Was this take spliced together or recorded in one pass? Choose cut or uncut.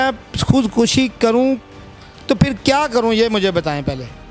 uncut